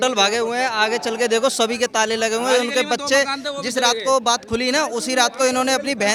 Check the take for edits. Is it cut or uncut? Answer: uncut